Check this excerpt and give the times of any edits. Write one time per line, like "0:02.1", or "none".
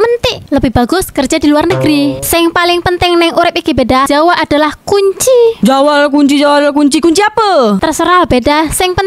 0:02.2
0:04.1
0:05.6